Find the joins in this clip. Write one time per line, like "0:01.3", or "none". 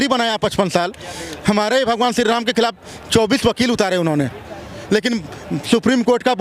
none